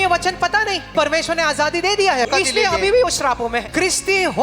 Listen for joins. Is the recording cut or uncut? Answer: cut